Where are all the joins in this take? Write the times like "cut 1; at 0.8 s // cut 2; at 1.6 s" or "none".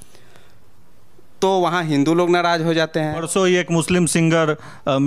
cut 1; at 3.2 s